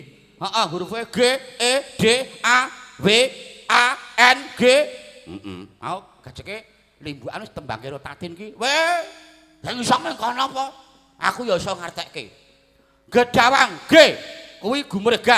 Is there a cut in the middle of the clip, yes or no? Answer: no